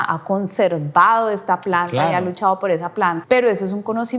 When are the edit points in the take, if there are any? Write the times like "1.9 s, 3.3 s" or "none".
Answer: 3.2 s